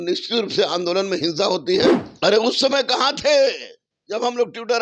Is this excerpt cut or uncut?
cut